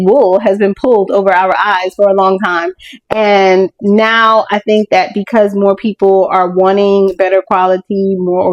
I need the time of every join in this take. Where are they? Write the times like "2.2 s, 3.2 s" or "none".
none